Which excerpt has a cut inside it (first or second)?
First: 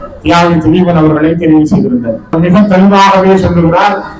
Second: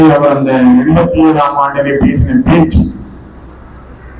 first